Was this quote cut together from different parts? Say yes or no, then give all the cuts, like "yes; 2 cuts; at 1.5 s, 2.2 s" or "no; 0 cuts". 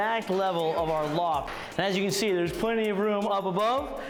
no; 0 cuts